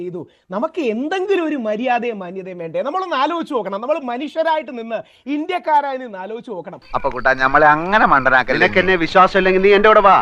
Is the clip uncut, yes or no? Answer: yes